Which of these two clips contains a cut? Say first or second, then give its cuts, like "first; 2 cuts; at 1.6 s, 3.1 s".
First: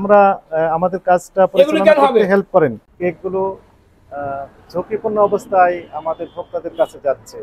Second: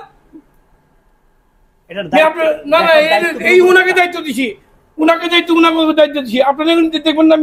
first; 1 cut; at 2.9 s